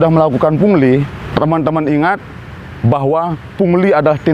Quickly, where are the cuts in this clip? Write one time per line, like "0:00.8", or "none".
0:01.2